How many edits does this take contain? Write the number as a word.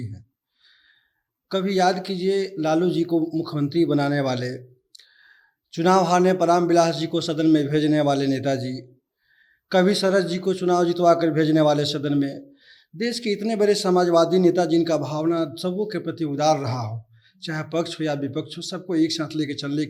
zero